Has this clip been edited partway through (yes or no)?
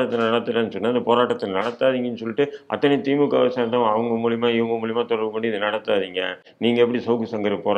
no